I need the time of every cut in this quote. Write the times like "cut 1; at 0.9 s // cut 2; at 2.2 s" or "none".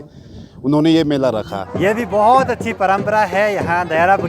cut 1; at 1.6 s